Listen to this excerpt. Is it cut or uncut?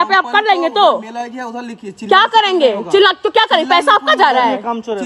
uncut